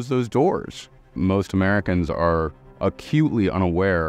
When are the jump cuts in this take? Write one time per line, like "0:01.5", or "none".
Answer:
0:01.2